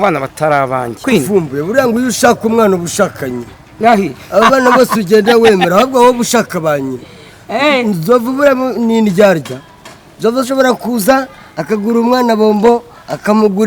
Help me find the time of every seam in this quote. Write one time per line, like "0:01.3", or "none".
0:01.0

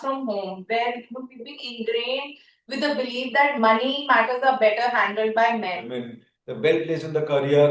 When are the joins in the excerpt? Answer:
0:05.9

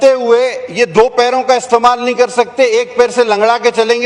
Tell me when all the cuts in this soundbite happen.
none

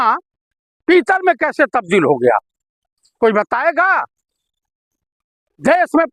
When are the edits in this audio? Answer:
none

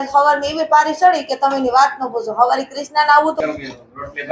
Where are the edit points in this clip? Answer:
0:03.4

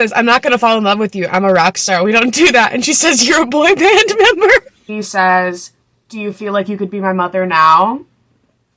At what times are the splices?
0:04.8

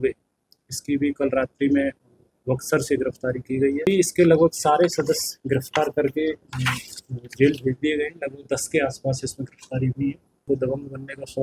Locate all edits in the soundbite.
0:03.9
0:10.5

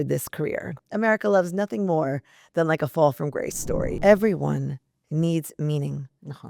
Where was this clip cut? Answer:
0:00.9
0:03.9

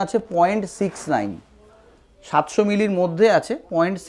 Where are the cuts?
none

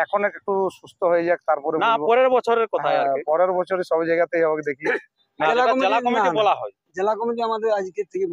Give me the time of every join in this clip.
0:05.3

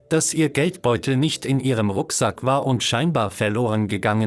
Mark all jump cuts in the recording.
none

